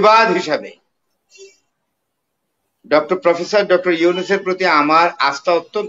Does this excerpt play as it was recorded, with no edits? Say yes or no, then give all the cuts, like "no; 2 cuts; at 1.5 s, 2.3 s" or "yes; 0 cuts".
yes; 0 cuts